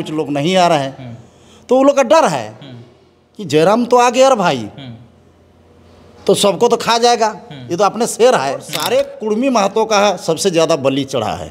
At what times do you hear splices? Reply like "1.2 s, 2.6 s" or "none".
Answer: 8.7 s